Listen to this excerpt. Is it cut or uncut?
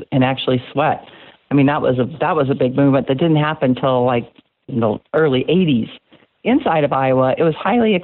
cut